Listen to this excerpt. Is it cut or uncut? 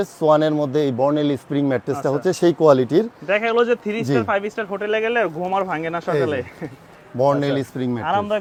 uncut